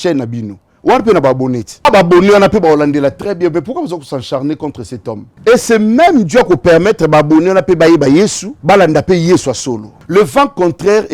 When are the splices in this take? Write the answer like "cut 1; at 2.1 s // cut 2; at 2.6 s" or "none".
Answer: cut 1; at 1.9 s // cut 2; at 5.3 s // cut 3; at 8.5 s // cut 4; at 9.9 s